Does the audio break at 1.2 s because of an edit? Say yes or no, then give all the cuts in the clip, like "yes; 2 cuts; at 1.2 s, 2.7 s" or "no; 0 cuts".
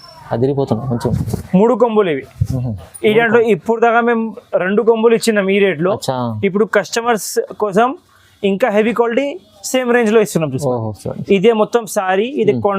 yes; 1 cut; at 1.2 s